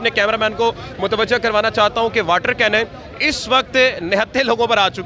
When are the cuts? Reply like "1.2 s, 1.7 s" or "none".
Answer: none